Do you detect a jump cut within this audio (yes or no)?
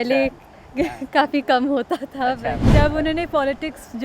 yes